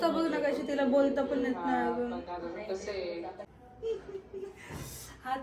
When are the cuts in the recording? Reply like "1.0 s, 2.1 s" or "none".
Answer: 3.4 s